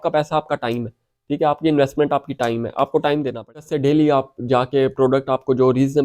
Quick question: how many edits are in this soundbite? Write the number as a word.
one